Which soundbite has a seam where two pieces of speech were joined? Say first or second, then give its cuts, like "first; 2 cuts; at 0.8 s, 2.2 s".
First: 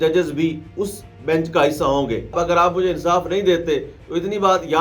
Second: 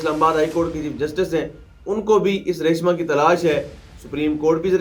first; 1 cut; at 2.4 s